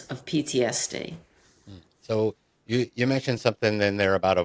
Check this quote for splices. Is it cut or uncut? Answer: uncut